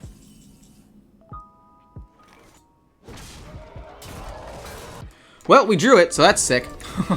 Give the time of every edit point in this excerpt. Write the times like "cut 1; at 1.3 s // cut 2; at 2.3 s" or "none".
cut 1; at 5.0 s